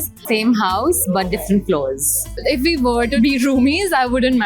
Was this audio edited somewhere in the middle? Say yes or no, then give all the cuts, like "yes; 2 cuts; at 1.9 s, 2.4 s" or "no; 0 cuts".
yes; 2 cuts; at 2.2 s, 3.2 s